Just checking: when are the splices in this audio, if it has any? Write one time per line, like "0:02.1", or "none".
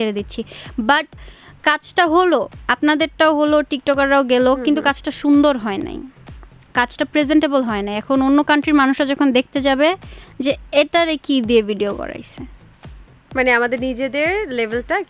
none

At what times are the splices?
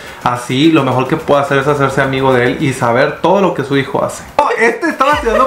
0:04.4

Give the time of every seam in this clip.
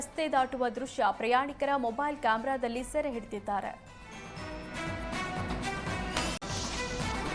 0:06.5

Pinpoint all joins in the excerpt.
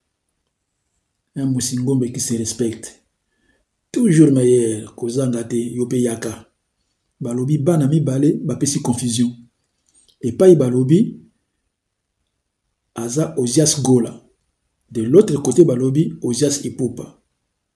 none

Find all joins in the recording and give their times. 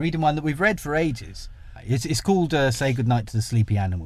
0:01.7

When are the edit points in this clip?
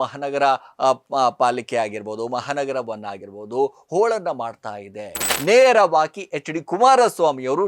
0:05.3

